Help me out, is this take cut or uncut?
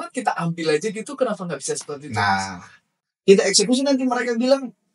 cut